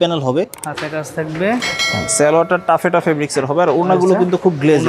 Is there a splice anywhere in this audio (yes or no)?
no